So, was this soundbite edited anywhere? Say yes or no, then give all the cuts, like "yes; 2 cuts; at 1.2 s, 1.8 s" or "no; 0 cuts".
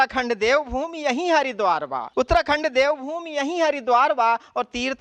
yes; 1 cut; at 2.0 s